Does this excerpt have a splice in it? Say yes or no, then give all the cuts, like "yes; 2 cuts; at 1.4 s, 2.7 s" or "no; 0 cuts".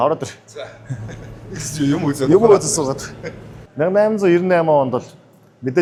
no; 0 cuts